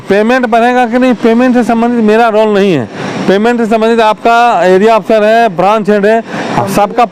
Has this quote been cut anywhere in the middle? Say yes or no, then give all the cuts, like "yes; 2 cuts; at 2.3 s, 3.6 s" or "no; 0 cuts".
no; 0 cuts